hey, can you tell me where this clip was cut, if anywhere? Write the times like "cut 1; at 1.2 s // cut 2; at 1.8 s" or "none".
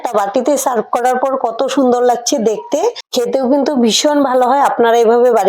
cut 1; at 3.0 s